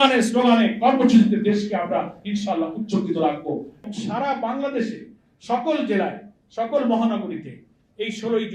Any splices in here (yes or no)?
yes